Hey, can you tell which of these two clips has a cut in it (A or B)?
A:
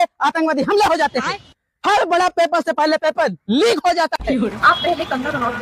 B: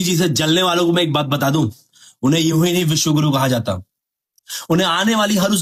A